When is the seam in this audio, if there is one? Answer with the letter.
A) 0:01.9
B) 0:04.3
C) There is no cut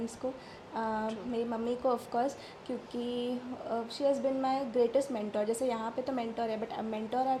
C